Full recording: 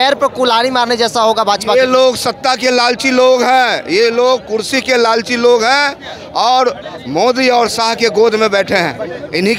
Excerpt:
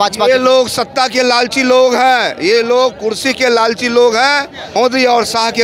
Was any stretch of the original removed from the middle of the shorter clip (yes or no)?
yes